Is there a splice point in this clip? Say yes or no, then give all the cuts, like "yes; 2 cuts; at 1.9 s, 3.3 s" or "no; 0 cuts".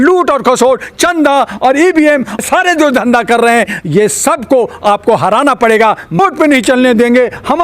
yes; 2 cuts; at 2.4 s, 6.2 s